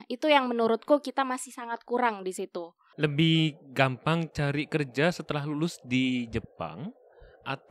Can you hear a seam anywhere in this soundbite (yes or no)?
yes